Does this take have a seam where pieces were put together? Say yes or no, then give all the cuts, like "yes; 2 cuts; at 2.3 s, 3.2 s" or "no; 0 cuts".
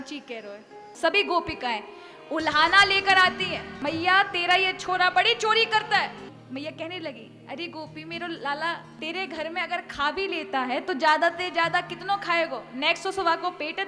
yes; 4 cuts; at 0.9 s, 3.8 s, 6.3 s, 8.9 s